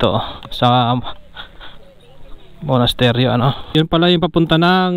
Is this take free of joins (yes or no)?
no